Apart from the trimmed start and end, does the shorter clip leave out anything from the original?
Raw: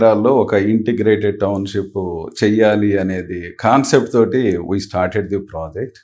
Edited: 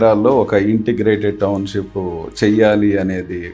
no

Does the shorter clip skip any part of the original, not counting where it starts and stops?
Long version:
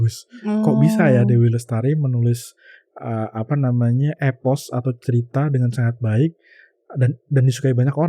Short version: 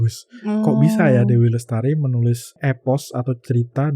yes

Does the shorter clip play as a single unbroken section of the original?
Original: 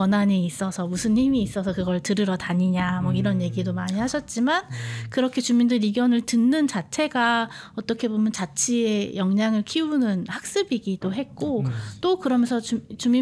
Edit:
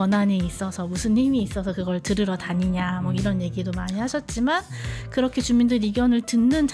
yes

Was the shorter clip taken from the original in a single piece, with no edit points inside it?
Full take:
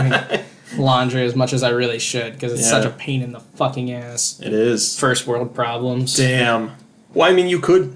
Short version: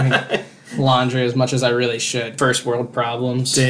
no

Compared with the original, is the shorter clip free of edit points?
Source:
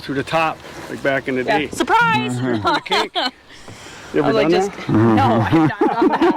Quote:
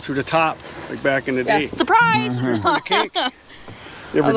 yes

